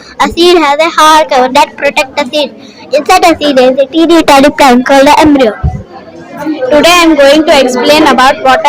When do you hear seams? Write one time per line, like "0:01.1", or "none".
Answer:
0:06.4